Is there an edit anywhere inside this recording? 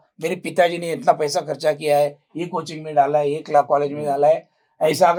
no; 0 cuts

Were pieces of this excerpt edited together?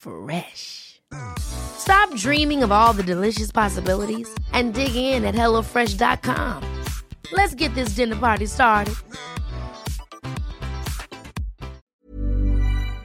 yes; 1 cut; at 11.8 s

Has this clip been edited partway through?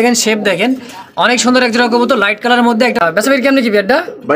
yes; 1 cut; at 3.0 s

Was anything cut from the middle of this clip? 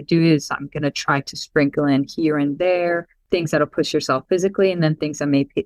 yes; 1 cut; at 3.1 s

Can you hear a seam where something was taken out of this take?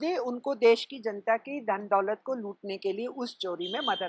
no; 0 cuts

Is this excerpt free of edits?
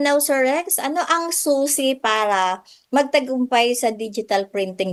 yes; 0 cuts

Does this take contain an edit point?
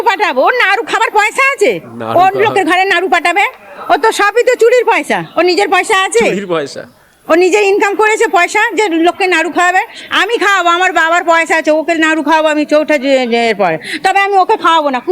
no; 0 cuts

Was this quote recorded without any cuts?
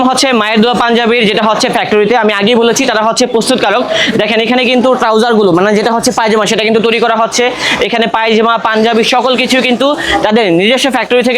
yes; 0 cuts

